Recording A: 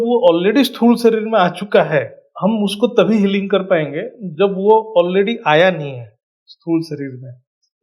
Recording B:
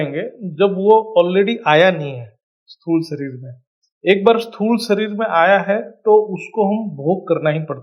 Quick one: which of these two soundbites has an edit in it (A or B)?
A